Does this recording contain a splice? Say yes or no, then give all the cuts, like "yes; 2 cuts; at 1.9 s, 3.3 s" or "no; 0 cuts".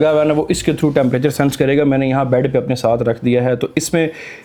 no; 0 cuts